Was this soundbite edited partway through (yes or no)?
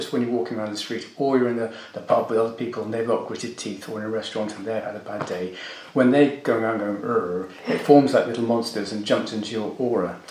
no